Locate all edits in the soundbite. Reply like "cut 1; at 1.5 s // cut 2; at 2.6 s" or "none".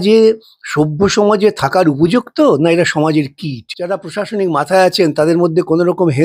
cut 1; at 3.7 s